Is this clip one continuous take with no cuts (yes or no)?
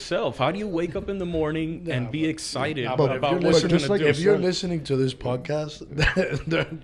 yes